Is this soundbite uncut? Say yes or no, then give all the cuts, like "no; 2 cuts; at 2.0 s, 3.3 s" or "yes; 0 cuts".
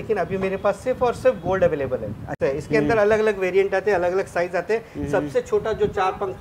no; 1 cut; at 2.3 s